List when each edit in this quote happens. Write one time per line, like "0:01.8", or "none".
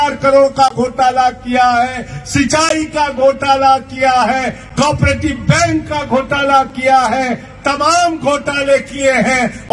none